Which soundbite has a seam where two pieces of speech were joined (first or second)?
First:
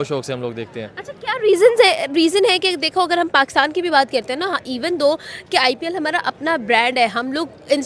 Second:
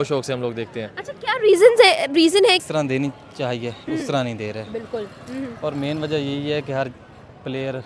second